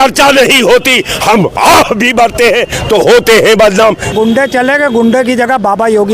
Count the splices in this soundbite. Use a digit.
1